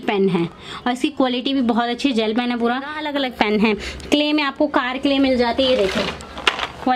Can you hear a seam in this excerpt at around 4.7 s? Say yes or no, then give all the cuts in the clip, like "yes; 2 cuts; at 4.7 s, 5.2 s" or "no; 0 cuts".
no; 1 cut; at 3.0 s